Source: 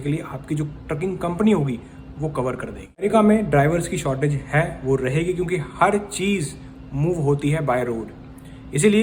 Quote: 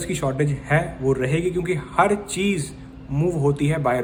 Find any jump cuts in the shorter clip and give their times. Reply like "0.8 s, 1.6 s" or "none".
none